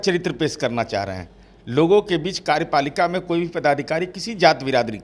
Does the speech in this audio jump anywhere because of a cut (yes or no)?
no